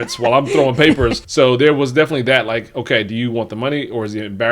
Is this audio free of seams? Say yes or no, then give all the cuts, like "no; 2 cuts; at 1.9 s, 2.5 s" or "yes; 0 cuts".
no; 1 cut; at 1.2 s